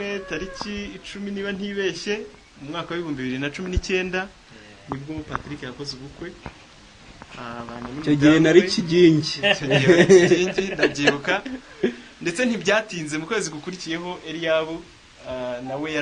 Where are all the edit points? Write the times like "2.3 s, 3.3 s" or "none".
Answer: none